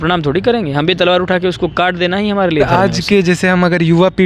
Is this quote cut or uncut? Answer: cut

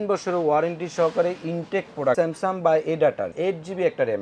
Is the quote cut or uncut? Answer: cut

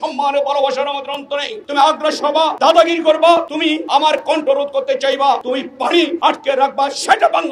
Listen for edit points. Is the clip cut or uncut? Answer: cut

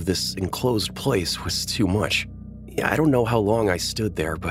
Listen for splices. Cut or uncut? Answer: uncut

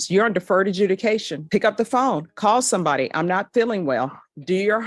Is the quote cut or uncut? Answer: uncut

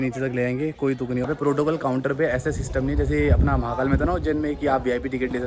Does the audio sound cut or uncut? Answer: cut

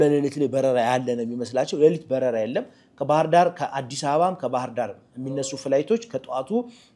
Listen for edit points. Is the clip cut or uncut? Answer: uncut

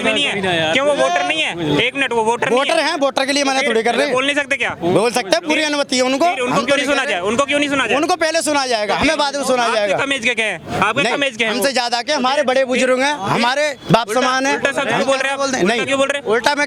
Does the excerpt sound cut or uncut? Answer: uncut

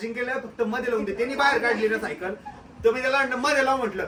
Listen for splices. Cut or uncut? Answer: uncut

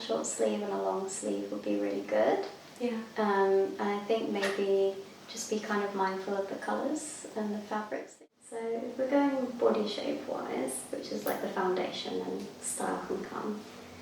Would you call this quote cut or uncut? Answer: cut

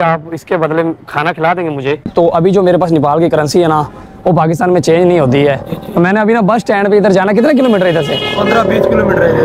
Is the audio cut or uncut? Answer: cut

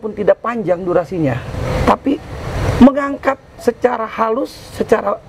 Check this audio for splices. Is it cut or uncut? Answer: uncut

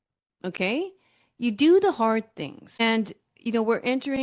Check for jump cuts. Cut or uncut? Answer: cut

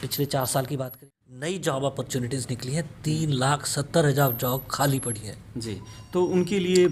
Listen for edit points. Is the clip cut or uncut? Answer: cut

